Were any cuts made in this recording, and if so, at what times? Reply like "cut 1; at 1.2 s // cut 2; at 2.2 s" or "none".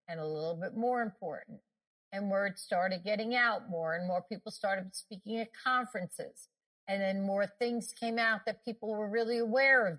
none